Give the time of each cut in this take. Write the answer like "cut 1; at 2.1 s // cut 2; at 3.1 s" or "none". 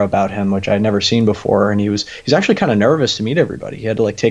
none